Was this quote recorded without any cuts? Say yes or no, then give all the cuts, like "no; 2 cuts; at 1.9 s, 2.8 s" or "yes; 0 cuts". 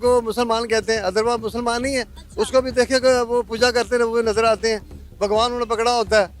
yes; 0 cuts